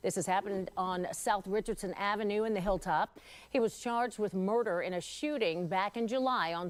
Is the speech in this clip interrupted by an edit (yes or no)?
no